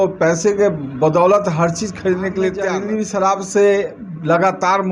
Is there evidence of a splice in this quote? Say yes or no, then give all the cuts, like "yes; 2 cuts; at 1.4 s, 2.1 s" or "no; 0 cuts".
yes; 1 cut; at 2.8 s